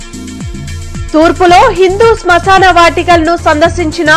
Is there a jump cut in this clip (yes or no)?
no